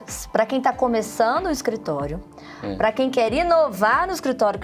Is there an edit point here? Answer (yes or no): no